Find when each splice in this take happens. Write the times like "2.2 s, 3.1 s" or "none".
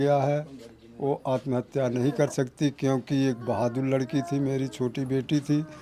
none